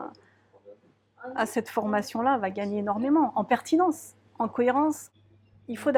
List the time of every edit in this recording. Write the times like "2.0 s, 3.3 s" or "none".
5.1 s